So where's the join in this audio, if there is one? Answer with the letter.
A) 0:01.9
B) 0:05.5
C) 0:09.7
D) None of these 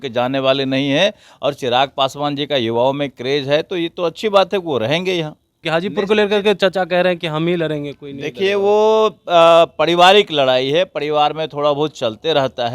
B